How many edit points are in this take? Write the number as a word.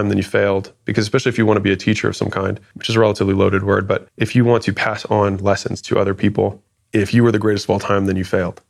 one